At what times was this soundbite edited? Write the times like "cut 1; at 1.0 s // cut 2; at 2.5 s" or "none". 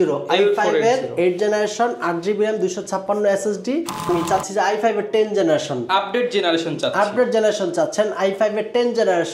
cut 1; at 4.1 s